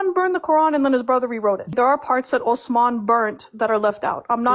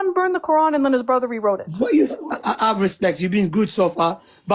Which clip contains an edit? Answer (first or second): first